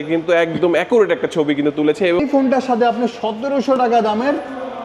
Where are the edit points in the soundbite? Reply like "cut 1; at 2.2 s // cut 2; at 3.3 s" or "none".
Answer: cut 1; at 2.2 s